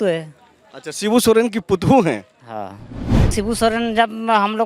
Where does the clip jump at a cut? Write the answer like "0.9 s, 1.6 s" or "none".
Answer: 3.2 s

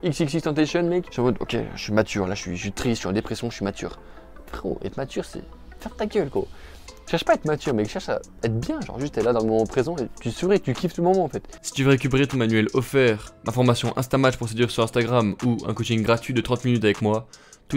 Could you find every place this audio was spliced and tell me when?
11.5 s

